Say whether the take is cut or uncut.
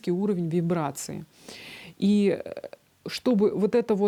uncut